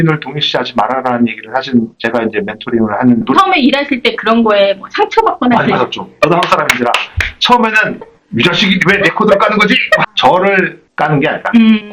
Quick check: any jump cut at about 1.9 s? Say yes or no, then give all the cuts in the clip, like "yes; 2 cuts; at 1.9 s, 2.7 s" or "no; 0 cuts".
no; 4 cuts; at 3.3 s, 6.1 s, 8.0 s, 10.0 s